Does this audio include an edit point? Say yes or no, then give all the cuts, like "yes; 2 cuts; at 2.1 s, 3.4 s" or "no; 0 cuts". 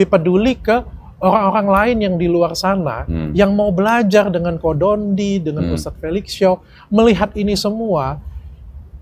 no; 0 cuts